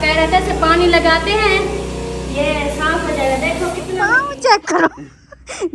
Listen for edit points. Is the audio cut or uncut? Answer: cut